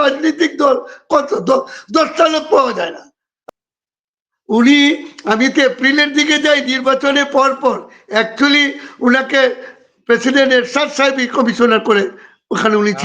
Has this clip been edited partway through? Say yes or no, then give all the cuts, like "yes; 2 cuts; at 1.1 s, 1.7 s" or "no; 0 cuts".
yes; 1 cut; at 3.4 s